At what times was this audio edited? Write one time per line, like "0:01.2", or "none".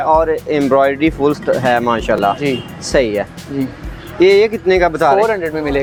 none